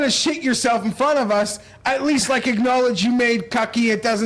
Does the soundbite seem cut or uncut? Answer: uncut